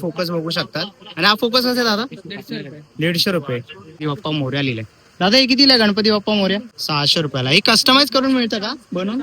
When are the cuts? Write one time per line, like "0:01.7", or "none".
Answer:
0:04.0
0:06.8